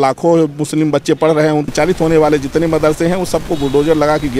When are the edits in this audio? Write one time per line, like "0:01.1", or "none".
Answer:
0:01.7